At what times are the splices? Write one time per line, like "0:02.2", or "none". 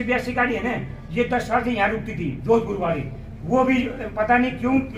none